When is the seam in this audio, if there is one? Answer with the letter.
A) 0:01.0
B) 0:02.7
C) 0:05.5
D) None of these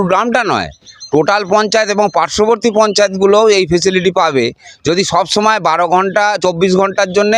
D